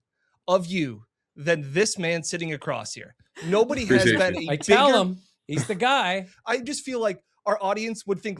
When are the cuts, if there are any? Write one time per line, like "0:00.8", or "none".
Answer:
0:06.3